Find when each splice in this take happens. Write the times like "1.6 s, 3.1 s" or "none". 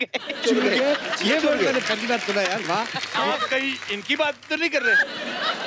3.0 s